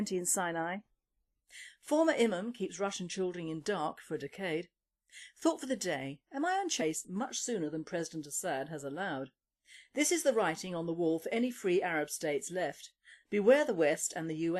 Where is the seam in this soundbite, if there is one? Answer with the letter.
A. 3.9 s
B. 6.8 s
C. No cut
C